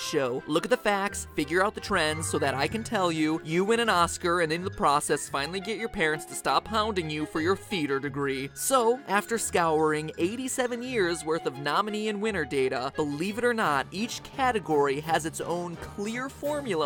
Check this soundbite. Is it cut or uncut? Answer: uncut